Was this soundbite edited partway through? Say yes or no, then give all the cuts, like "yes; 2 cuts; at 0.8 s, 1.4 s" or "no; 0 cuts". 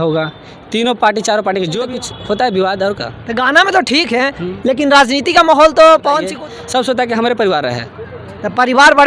yes; 2 cuts; at 1.8 s, 6.3 s